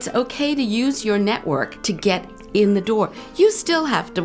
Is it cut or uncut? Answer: cut